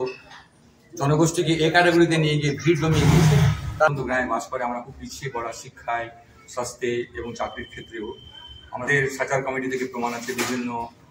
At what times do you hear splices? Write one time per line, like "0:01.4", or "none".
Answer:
0:03.9
0:08.9